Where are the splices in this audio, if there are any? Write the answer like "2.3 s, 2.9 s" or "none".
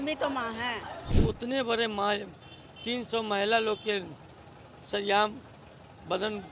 1.1 s